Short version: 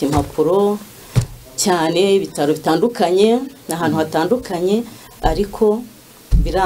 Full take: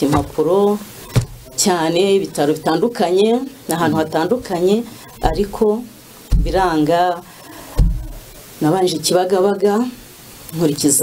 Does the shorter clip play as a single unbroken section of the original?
yes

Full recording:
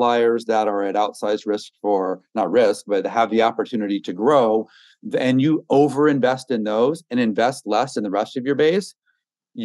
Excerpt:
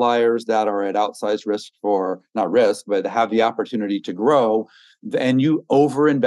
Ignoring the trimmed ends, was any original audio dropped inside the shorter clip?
no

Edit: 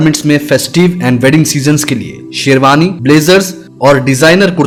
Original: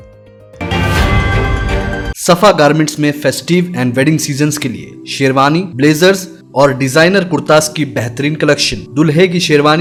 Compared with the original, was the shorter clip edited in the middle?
no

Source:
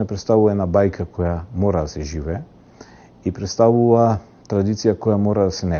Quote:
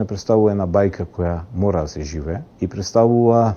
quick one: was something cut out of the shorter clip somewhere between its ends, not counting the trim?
yes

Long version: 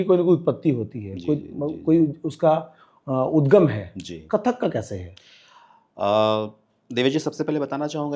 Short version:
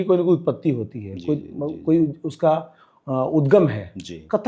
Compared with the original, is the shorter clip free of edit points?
yes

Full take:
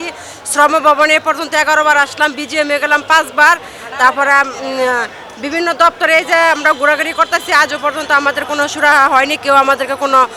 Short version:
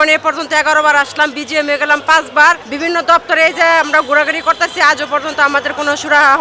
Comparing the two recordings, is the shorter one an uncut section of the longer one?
no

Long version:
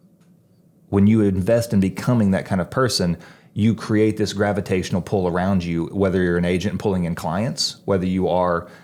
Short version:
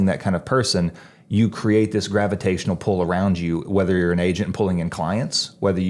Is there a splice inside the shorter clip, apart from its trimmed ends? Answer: no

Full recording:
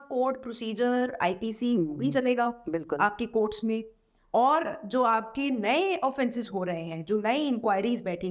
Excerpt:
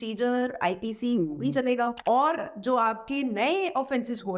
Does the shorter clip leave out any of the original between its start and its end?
yes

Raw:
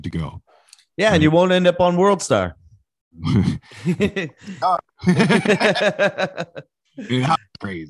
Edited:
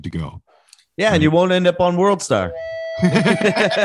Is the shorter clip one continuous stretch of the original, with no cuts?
no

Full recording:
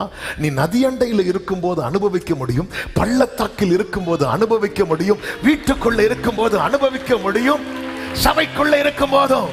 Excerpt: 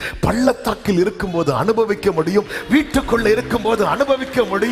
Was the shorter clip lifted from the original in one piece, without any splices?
yes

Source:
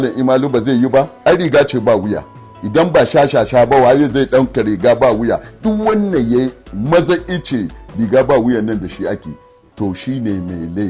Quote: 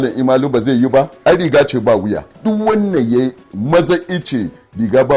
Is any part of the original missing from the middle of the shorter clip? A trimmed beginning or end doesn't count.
yes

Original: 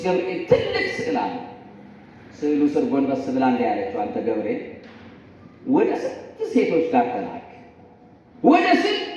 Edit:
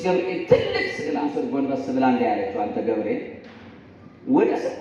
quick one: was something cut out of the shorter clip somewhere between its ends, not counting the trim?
yes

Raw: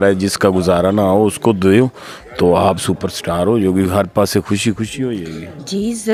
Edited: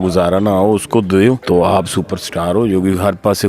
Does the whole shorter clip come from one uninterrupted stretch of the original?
no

